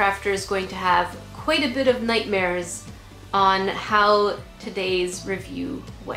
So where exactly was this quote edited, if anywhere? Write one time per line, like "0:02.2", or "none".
none